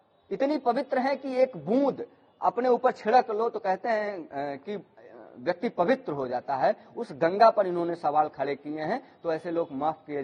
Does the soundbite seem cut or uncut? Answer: uncut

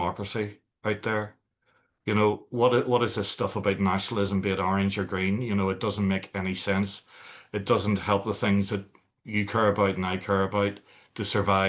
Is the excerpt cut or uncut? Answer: uncut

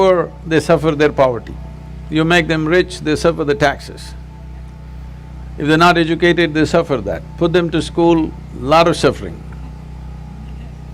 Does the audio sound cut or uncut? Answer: uncut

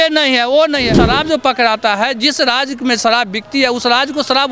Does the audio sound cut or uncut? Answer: cut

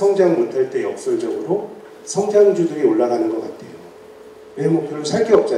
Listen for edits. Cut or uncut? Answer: uncut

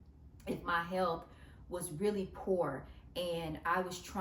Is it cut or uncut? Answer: uncut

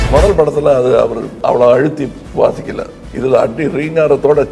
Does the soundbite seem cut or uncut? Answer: cut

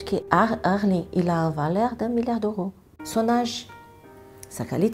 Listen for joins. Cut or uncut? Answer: cut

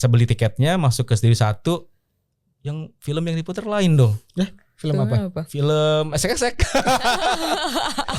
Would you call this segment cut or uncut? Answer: uncut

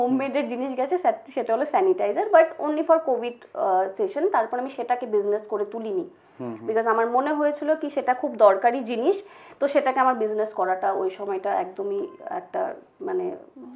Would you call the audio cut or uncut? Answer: uncut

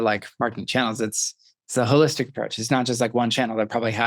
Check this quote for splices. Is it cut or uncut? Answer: uncut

